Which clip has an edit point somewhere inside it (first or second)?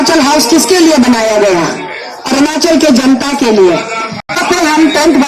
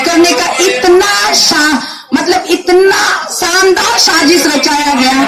first